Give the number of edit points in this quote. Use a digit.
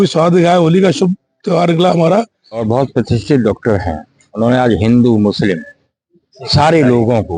1